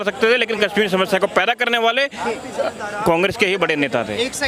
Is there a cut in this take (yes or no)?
no